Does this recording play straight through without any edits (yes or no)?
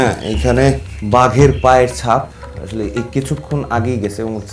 no